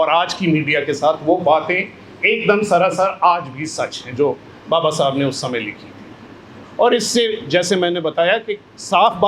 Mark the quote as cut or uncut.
uncut